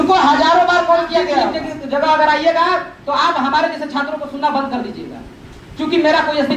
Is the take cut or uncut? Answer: uncut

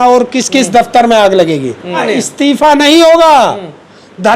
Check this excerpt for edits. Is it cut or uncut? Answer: cut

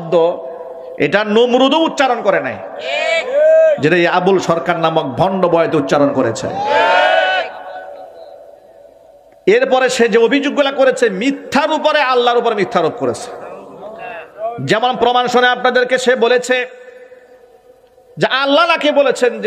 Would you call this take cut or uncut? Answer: uncut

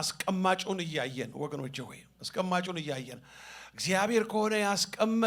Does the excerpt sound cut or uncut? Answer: uncut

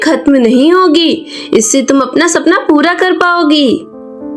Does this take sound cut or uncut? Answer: uncut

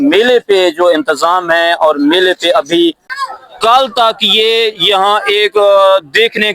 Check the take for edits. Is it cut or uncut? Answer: cut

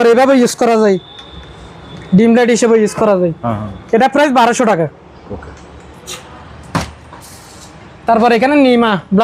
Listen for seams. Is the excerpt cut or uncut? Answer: uncut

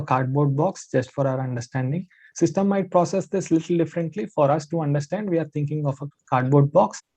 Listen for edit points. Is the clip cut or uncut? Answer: uncut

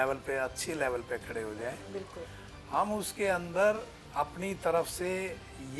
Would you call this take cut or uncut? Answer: uncut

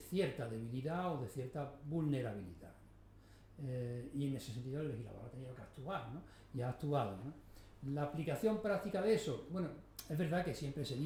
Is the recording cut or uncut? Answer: uncut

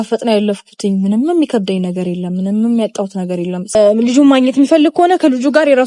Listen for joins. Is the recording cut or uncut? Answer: cut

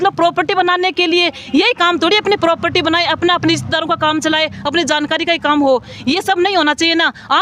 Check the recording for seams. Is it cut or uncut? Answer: uncut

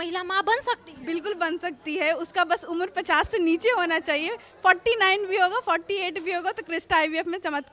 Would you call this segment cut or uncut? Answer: uncut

